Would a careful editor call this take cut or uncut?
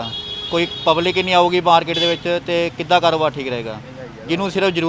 uncut